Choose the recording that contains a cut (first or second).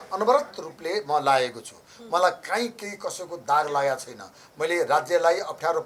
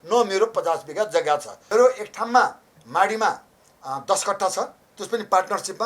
second